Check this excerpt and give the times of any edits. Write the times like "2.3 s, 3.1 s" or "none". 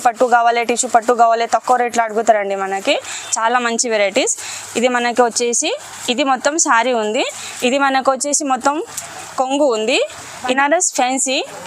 10.4 s